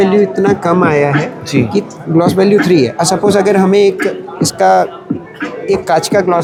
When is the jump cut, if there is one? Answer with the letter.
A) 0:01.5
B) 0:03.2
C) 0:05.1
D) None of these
D